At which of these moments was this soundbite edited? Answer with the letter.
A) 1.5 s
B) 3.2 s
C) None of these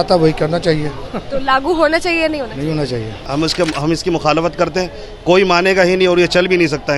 B